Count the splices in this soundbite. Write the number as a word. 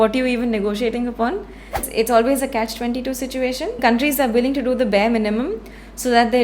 two